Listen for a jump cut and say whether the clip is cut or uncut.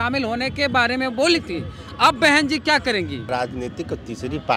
cut